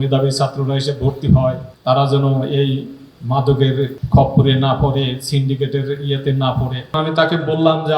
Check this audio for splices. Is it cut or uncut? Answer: cut